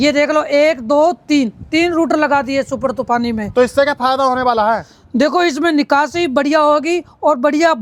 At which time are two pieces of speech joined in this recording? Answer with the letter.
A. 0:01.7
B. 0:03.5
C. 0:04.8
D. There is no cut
D